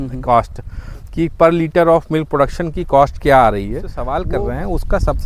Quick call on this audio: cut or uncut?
cut